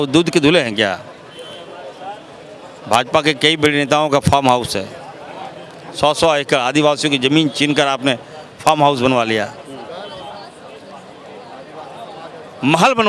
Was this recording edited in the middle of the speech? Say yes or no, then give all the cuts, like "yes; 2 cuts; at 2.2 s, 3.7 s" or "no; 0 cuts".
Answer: no; 0 cuts